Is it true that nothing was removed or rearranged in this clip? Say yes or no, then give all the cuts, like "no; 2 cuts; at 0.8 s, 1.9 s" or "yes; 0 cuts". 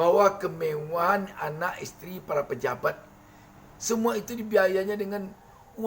no; 1 cut; at 3.6 s